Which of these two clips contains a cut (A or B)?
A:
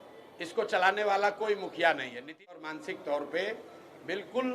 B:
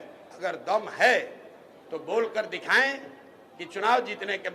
A